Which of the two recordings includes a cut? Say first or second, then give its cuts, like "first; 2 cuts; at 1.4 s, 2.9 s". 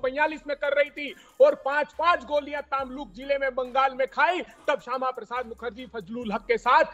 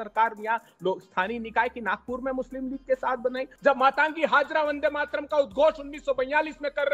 second; 1 cut; at 3.5 s